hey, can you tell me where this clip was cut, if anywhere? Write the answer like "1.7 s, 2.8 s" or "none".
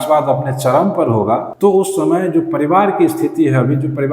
1.5 s